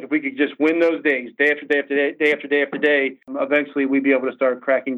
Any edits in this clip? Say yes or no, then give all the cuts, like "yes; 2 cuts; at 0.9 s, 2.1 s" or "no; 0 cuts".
yes; 1 cut; at 3.3 s